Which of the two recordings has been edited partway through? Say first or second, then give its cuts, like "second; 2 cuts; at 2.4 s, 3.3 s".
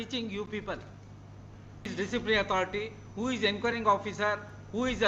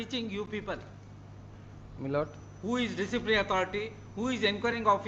first; 1 cut; at 1.9 s